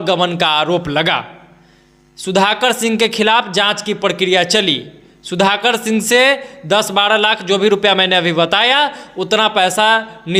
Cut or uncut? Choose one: uncut